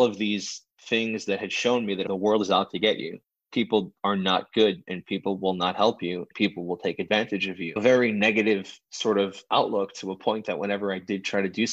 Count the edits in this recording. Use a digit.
2